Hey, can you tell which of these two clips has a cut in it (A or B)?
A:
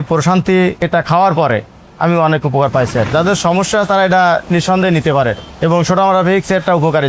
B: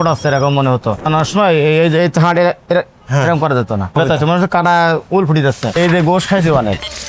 B